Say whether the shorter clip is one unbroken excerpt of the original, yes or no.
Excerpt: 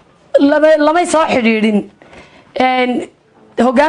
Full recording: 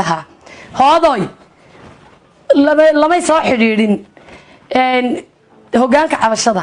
yes